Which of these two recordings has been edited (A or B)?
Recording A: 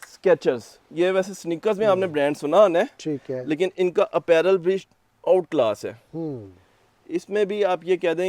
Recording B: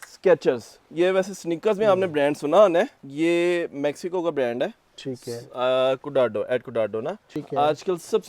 B